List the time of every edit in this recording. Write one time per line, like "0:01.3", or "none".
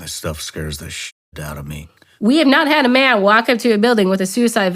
0:02.1

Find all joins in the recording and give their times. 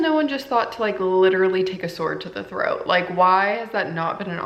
none

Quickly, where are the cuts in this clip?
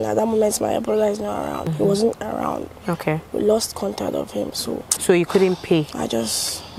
0:01.6
0:04.9

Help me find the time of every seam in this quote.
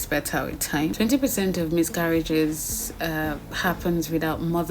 0:00.9

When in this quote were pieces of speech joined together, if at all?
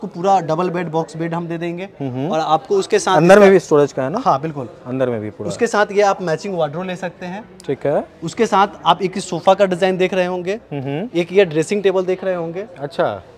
none

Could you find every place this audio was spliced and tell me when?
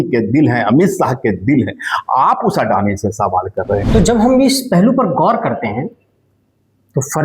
0:03.9

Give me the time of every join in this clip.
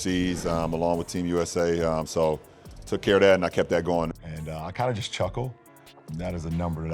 none

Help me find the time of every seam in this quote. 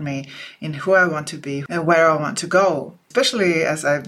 0:01.6
0:03.0

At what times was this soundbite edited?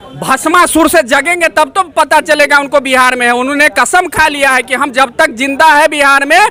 none

